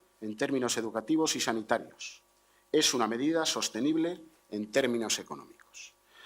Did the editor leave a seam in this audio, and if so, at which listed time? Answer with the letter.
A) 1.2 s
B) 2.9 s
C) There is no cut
C